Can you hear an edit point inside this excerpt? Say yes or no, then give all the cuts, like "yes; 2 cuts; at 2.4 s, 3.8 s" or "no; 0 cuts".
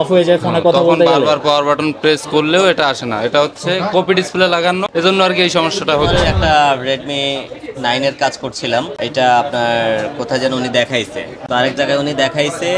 yes; 3 cuts; at 4.9 s, 6.1 s, 11.3 s